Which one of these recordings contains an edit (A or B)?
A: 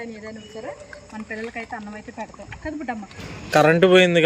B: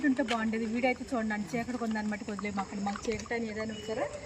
A